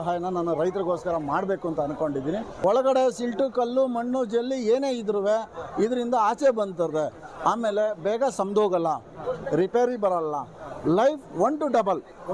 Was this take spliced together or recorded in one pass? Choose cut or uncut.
cut